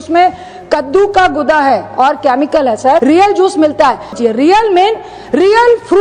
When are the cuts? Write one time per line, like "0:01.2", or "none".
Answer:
0:03.0
0:04.1